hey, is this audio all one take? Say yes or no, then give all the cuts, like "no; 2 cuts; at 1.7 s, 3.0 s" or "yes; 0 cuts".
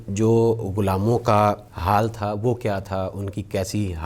no; 1 cut; at 1.7 s